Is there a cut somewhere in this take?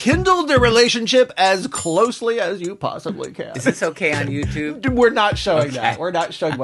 no; 0 cuts

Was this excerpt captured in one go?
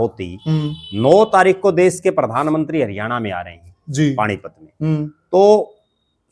yes; 0 cuts

